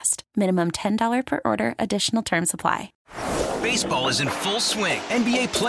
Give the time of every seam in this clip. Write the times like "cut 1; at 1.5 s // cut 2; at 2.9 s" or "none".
cut 1; at 3.0 s